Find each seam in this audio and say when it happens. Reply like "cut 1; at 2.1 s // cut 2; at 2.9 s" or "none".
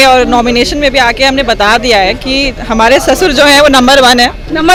none